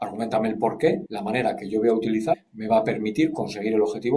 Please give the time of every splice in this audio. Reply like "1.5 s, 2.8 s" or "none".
1.1 s, 2.5 s